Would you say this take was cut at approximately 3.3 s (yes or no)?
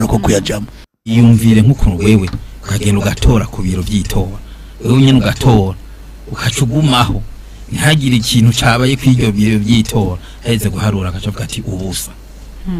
no